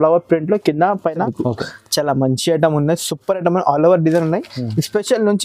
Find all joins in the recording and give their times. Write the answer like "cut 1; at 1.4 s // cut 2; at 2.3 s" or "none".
cut 1; at 1.3 s